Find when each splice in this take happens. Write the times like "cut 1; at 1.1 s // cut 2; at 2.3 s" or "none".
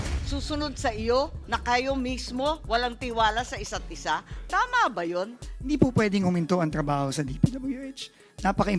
cut 1; at 5.7 s